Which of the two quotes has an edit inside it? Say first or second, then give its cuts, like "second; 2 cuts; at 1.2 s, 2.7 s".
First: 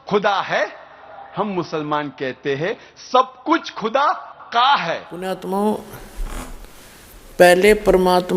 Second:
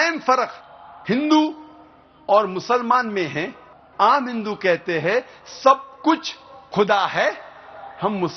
first; 1 cut; at 5.2 s